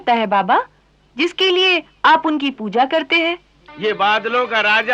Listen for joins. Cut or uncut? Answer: cut